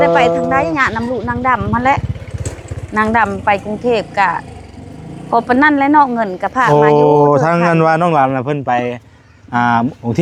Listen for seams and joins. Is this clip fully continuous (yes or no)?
yes